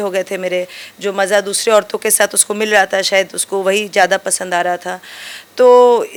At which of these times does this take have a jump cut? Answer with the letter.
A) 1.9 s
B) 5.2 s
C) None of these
C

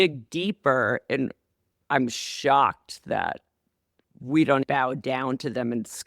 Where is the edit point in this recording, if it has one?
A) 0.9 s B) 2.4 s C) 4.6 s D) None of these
C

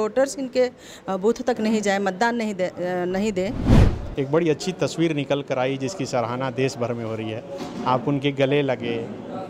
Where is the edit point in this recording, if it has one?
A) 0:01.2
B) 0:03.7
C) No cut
B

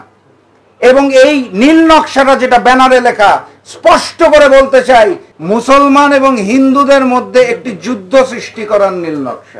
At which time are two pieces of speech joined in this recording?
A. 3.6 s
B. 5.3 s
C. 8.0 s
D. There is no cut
B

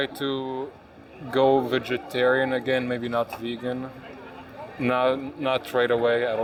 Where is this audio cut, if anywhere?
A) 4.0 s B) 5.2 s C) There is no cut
C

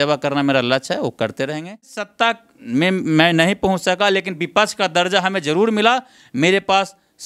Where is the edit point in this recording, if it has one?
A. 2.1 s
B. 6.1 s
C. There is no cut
A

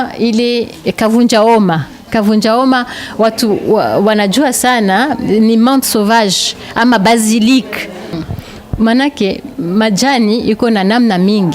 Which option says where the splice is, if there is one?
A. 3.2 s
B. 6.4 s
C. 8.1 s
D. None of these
C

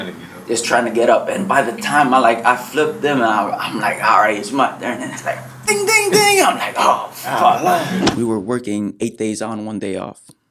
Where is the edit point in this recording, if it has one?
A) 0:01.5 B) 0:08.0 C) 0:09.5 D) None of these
B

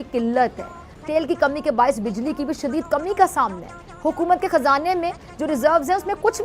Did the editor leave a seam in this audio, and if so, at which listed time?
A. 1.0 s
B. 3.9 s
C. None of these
A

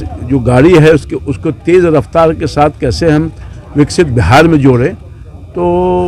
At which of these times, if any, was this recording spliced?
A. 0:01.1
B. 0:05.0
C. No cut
C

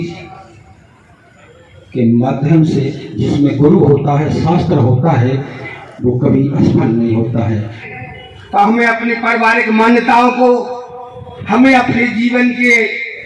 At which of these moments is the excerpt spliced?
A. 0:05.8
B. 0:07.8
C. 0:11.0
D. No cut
B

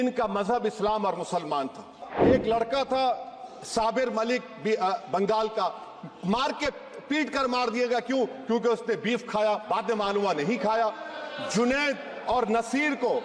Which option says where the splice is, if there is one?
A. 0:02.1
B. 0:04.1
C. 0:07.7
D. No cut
A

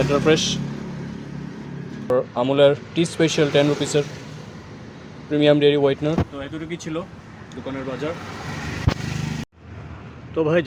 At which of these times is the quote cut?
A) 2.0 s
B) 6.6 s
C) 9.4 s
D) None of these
D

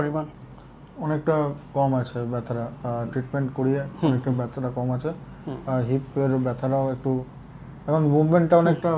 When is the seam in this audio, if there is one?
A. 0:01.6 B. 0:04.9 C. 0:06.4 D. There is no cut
D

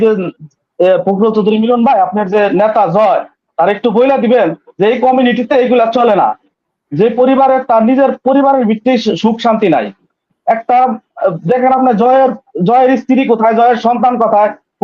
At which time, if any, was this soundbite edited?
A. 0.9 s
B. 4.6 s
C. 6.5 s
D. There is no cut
C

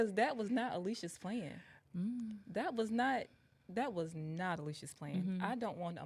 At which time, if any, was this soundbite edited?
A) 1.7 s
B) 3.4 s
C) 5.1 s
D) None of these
D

